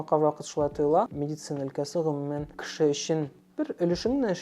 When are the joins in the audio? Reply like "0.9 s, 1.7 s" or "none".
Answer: 1.1 s, 2.6 s, 3.4 s